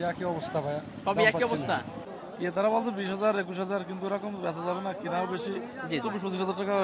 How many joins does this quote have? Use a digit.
1